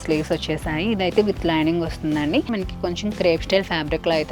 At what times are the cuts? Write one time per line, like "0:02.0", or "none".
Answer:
0:02.5

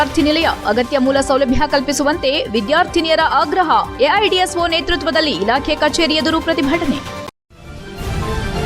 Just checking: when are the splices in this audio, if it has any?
0:07.2

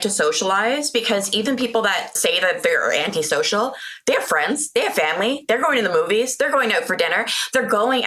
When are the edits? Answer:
0:02.1

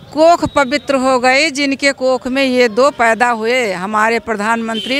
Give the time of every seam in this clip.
none

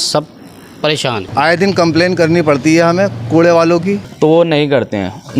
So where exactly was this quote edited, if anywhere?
0:01.3
0:04.1

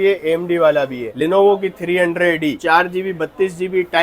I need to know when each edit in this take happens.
0:01.0

